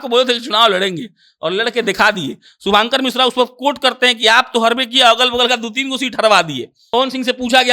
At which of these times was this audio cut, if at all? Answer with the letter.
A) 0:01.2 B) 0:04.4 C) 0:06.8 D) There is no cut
C